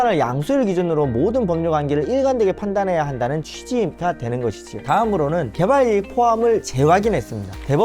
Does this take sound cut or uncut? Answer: cut